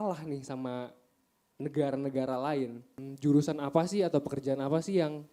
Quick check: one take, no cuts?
no; 1 cut; at 3.0 s

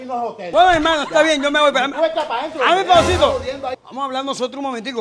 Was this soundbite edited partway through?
yes; 1 cut; at 3.8 s

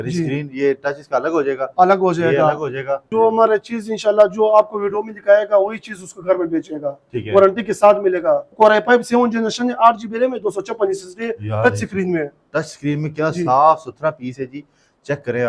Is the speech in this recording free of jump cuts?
no; 2 cuts; at 3.1 s, 8.5 s

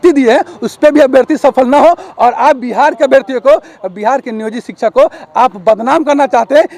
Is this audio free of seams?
yes; 0 cuts

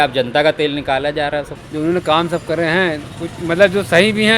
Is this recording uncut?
no; 1 cut; at 1.6 s

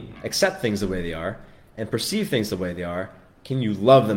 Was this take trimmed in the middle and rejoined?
no; 0 cuts

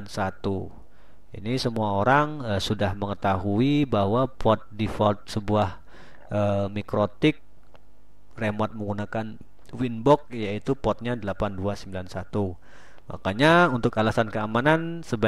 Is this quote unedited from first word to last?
yes; 0 cuts

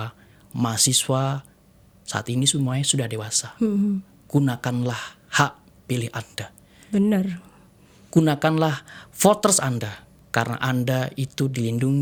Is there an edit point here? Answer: no; 0 cuts

